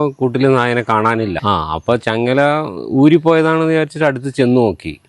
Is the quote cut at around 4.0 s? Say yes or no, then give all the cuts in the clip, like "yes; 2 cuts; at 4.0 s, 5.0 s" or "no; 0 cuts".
no; 1 cut; at 1.4 s